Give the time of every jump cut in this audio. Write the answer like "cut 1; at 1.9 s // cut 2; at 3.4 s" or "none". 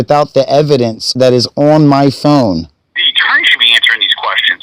cut 1; at 1.0 s // cut 2; at 2.7 s